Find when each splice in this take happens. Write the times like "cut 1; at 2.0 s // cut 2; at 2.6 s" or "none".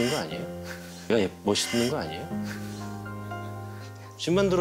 none